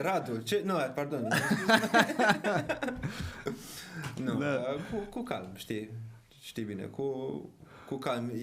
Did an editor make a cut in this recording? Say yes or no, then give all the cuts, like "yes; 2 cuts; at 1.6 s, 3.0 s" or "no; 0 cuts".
no; 0 cuts